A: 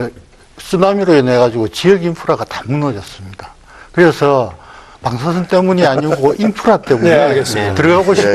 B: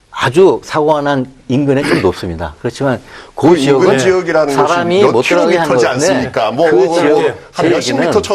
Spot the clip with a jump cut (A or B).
B